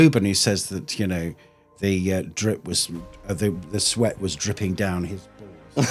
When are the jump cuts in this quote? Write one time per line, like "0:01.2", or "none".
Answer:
none